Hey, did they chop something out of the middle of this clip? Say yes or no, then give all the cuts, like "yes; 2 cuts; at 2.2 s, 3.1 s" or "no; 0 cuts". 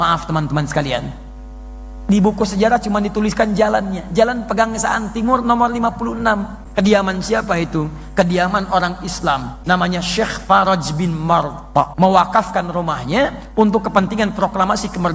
yes; 3 cuts; at 6.6 s, 9.5 s, 11.9 s